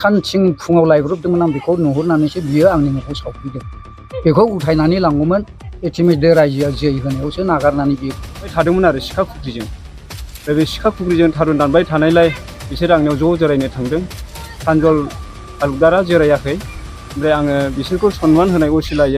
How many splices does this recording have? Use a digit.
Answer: 2